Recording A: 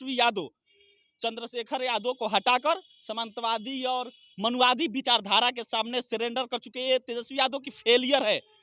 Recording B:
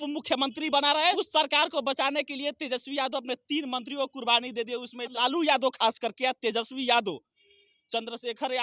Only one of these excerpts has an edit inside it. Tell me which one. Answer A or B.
B